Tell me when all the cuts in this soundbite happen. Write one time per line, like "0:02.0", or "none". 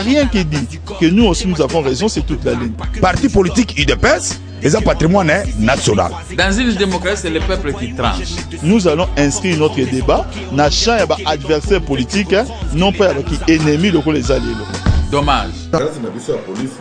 0:15.8